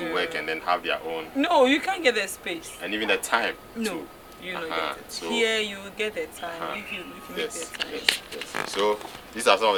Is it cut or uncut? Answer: uncut